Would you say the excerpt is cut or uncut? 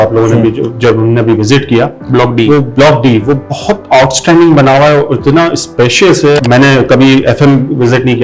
cut